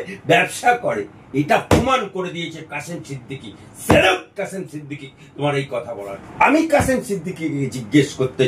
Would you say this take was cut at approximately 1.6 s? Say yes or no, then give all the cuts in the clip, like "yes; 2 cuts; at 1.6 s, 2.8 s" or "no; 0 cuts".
no; 1 cut; at 6.1 s